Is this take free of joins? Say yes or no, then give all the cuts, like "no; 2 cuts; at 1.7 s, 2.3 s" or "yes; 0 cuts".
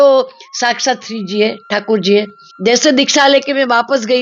no; 1 cut; at 2.4 s